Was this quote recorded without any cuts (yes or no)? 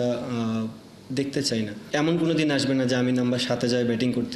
no